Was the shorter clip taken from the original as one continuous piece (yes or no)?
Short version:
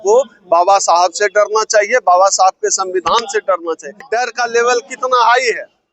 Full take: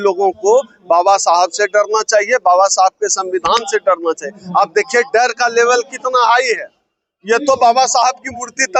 no